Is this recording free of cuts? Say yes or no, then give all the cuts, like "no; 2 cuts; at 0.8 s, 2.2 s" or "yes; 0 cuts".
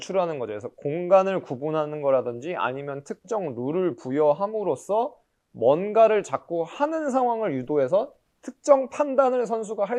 yes; 0 cuts